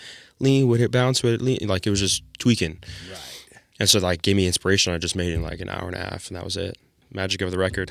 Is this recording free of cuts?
no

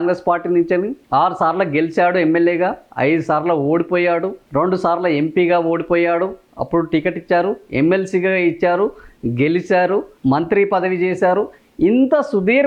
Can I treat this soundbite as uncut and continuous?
yes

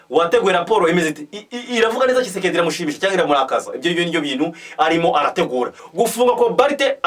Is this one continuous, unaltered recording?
no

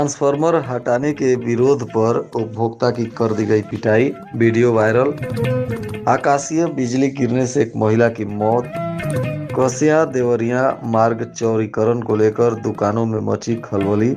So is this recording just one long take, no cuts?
yes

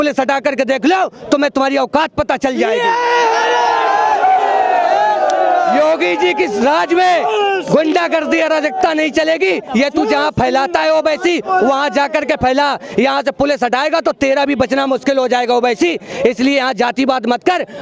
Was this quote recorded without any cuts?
yes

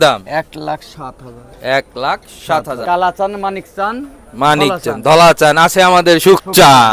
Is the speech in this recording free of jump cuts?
no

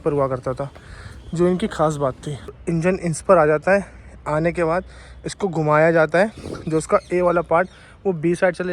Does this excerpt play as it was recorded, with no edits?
no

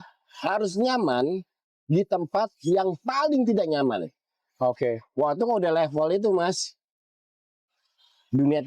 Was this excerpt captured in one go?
yes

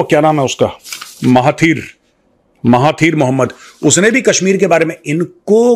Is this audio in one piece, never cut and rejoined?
yes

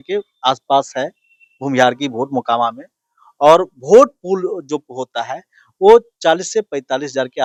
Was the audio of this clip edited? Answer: no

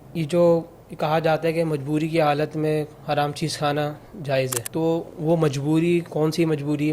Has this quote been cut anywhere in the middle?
yes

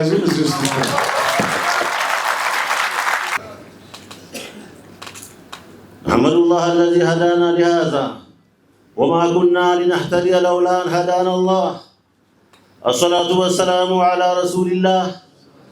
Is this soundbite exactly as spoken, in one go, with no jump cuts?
yes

